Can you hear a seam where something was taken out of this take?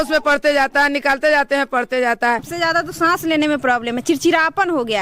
yes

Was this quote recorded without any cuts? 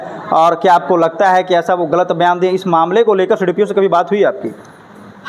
yes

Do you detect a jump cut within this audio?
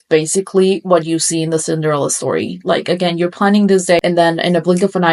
no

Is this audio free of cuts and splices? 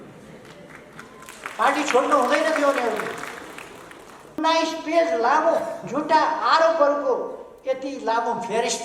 no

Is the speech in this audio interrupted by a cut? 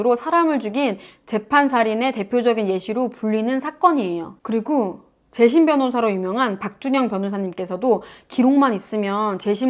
no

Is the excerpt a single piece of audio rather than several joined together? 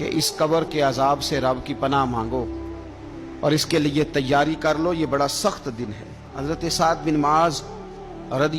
no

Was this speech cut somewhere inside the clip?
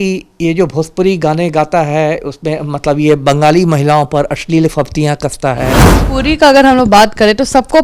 yes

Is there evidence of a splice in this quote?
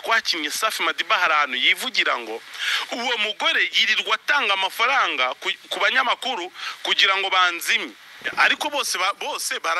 no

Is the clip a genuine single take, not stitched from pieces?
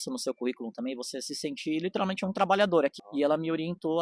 no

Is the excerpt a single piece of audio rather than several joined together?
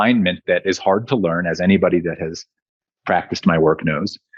yes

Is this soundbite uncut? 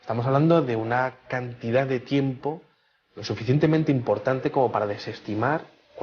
no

